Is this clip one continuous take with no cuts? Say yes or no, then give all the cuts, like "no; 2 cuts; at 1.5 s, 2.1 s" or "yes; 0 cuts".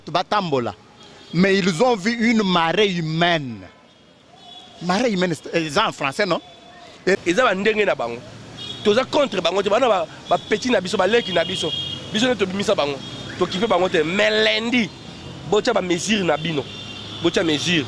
no; 1 cut; at 7.2 s